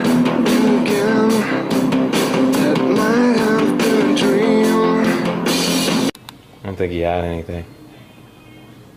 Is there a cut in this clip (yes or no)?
yes